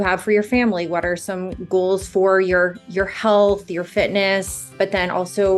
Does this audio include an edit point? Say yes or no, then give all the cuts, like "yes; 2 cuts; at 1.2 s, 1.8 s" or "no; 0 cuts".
yes; 1 cut; at 4.7 s